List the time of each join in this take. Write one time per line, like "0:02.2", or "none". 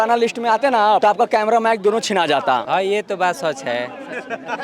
0:01.0
0:02.6